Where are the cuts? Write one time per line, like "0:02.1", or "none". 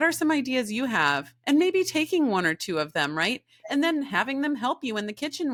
none

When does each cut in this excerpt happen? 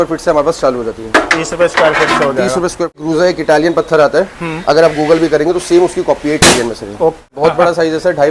0:03.0
0:07.3

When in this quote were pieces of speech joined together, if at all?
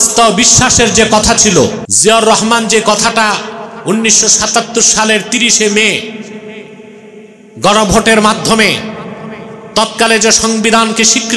0:01.9

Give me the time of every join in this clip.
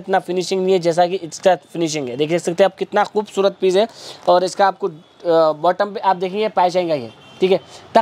none

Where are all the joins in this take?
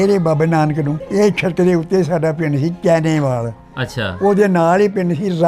0:01.0

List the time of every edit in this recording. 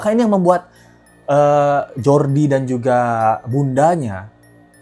none

